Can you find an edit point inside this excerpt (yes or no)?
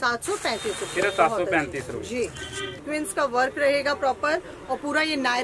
yes